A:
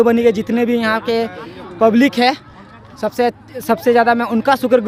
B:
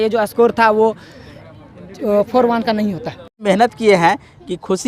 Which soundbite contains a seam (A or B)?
B